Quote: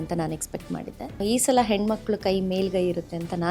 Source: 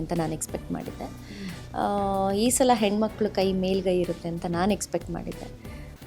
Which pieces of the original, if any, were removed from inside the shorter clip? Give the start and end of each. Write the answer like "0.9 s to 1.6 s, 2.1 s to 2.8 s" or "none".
1.2 s to 2.3 s

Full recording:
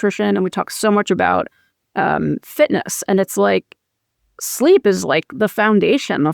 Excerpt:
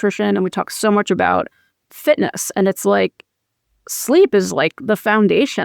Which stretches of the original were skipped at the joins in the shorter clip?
1.9 s to 2.4 s

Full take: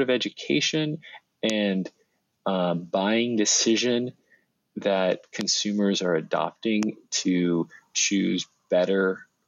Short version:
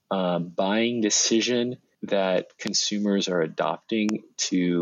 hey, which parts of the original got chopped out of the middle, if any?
4.2 s to 4.6 s

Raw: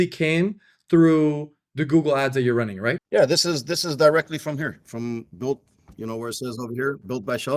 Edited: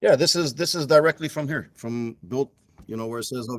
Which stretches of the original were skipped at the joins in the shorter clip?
none

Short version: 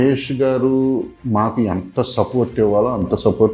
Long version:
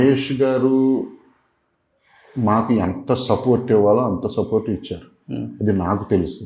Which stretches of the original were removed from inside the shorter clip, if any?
1.1 s to 2.3 s

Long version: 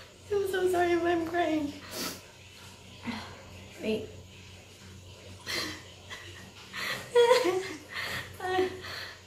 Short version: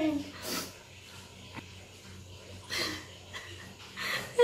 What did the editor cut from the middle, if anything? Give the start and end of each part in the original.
2.9 s to 4.2 s

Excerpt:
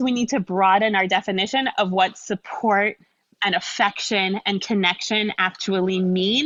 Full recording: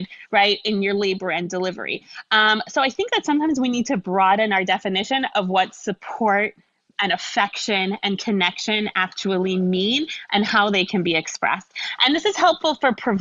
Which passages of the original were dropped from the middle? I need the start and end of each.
none

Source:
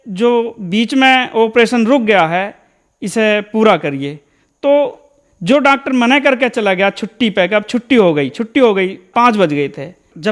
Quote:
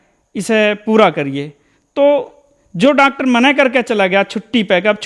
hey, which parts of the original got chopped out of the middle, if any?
none

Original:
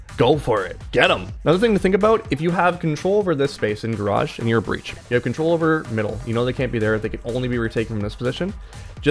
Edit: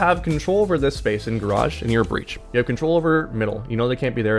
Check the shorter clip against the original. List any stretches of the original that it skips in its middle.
none

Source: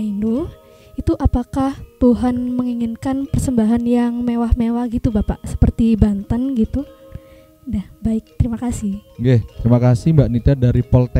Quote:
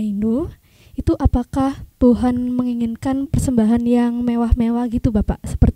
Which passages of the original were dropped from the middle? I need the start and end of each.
none

